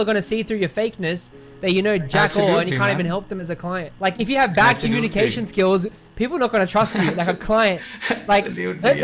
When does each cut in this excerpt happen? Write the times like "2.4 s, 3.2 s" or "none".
3.9 s